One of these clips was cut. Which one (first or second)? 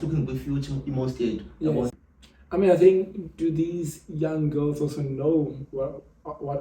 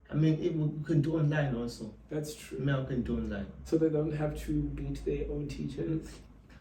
first